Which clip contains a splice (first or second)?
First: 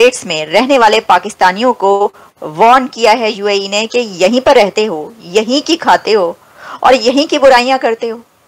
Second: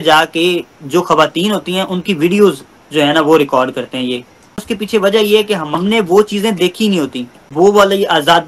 second